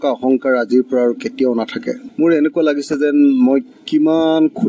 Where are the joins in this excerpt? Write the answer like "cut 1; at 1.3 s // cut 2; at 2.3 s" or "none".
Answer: cut 1; at 2.1 s